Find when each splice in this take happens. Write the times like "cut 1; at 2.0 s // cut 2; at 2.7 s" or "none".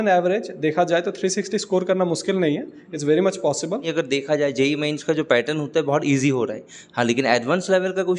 cut 1; at 3.9 s